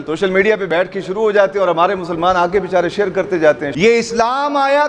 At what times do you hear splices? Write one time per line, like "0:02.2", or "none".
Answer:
0:03.7